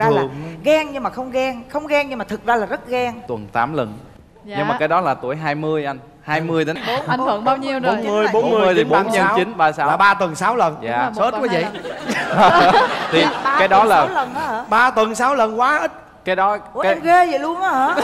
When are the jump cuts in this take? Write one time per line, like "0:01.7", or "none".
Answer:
0:03.2
0:06.8